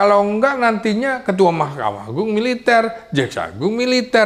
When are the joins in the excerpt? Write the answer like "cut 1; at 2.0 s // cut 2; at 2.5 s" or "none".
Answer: none